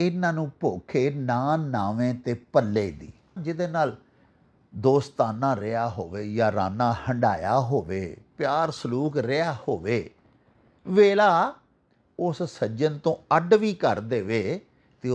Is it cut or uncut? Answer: cut